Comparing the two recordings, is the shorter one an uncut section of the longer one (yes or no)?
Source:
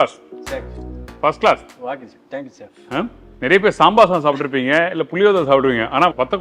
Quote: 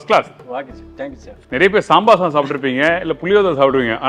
no